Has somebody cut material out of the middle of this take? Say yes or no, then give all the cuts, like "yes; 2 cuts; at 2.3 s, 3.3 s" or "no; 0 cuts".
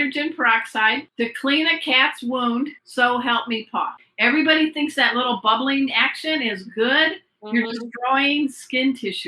yes; 3 cuts; at 1.1 s, 2.8 s, 4.0 s